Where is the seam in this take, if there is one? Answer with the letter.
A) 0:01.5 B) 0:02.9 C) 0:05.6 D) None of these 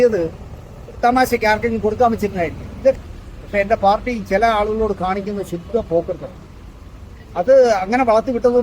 B